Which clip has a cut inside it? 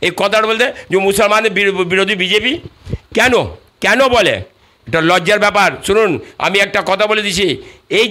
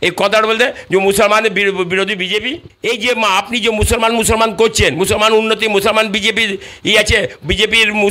second; 1 cut; at 2.7 s

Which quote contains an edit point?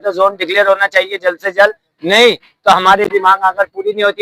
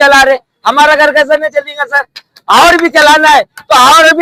first; 1 cut; at 3.1 s

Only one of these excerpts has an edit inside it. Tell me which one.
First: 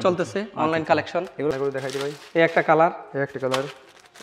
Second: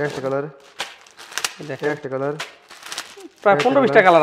first; 1 cut; at 1.5 s

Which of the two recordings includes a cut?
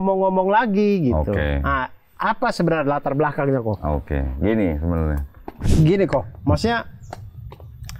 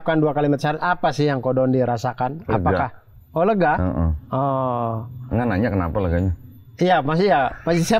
first; 1 cut; at 5.6 s

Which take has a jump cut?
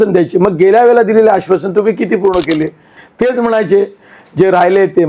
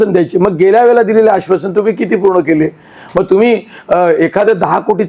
first; 1 cut; at 3.0 s

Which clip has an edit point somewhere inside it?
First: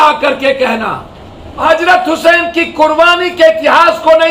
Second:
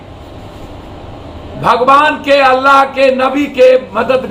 first; 1 cut; at 1.6 s

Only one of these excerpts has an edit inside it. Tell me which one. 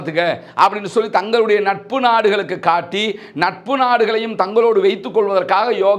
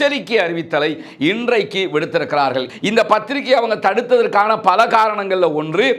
second; 1 cut; at 2.7 s

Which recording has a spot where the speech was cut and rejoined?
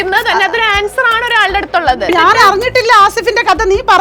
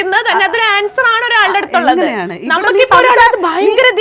first; 1 cut; at 2.1 s

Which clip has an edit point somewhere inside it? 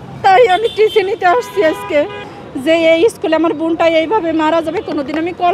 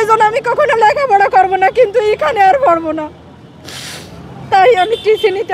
first; 1 cut; at 2.2 s

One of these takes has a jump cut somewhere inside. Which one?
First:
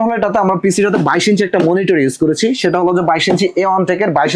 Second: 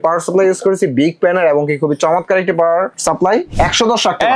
second; 1 cut; at 3.3 s

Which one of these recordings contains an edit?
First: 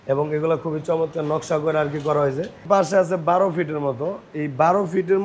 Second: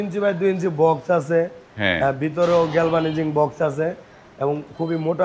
first; 1 cut; at 2.6 s

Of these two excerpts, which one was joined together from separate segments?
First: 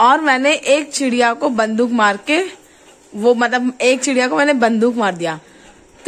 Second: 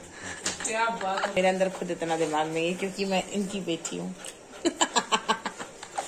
second; 1 cut; at 1.3 s

